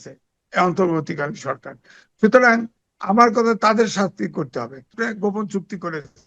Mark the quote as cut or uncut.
cut